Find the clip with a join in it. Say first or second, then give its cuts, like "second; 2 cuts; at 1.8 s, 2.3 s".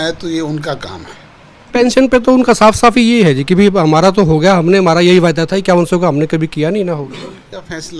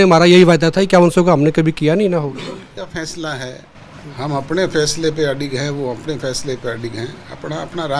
first; 1 cut; at 1.7 s